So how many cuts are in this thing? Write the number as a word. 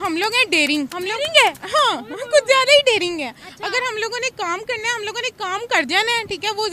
one